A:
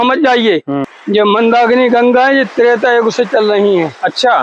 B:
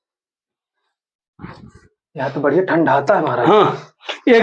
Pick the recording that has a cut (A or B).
A